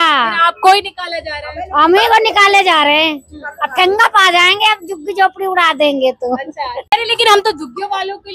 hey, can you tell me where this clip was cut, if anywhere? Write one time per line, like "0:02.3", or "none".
none

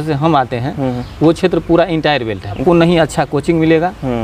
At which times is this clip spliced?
0:02.6

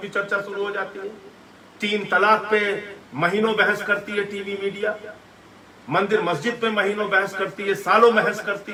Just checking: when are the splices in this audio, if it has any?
none

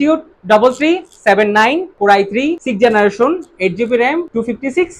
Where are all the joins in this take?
none

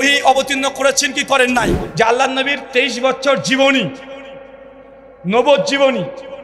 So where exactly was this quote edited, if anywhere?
0:01.8

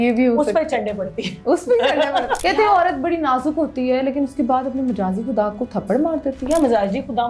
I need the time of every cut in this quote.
0:02.4

